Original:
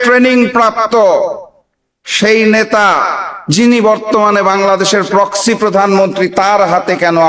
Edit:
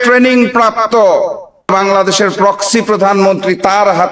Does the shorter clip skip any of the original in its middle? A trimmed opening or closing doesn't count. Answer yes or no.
yes